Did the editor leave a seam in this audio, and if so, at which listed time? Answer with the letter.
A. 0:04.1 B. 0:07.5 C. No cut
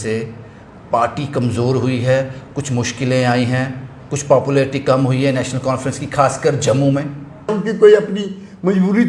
B